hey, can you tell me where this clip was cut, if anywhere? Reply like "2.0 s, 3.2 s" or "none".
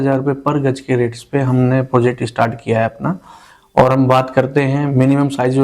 none